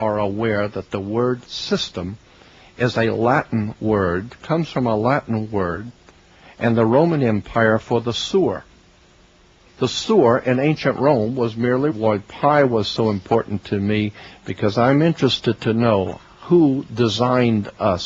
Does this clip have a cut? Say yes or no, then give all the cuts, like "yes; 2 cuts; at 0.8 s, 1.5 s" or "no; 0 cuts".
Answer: no; 0 cuts